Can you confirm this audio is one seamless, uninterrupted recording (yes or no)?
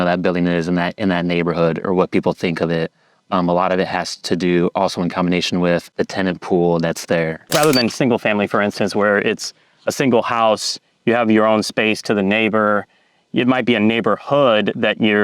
no